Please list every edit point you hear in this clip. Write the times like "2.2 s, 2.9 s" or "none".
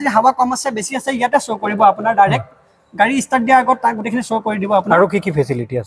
none